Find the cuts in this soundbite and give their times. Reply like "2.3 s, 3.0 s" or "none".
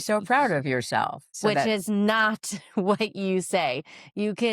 1.3 s